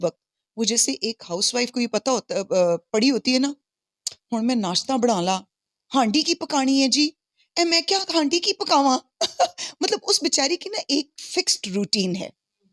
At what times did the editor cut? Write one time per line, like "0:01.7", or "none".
none